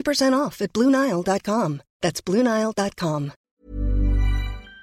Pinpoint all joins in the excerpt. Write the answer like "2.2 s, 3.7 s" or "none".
3.5 s